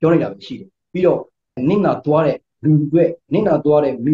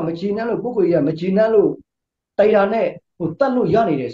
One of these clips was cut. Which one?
first; 2 cuts; at 1.6 s, 2.5 s

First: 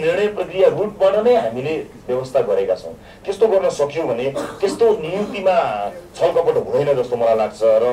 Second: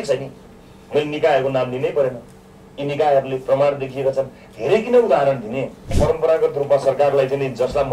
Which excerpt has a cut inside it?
second; 1 cut; at 5.9 s

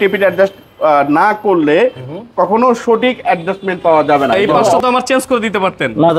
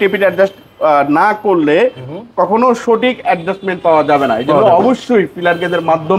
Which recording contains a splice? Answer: first; 1 cut; at 4.8 s

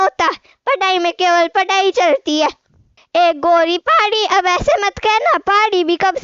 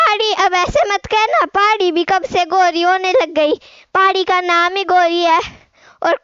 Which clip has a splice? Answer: first; 1 cut; at 3.0 s

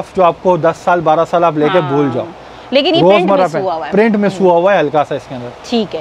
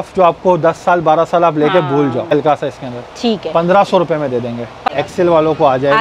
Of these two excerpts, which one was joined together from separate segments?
second; 2 cuts; at 2.3 s, 4.8 s

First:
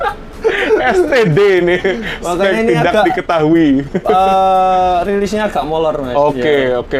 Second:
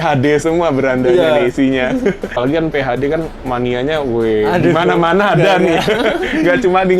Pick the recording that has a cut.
second; 1 cut; at 2.4 s

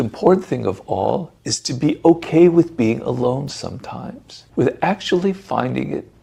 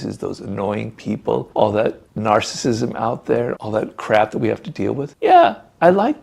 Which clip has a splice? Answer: second; 1 cut; at 1.5 s

